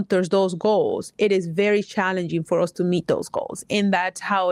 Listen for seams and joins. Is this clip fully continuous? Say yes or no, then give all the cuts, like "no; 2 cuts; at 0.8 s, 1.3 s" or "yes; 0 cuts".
yes; 0 cuts